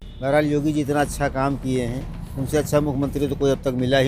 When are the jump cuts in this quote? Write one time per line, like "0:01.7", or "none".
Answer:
none